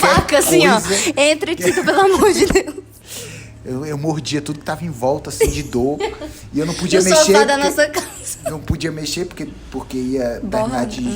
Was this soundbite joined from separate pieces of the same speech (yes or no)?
no